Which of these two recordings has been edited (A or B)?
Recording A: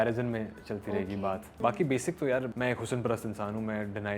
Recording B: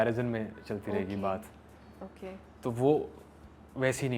A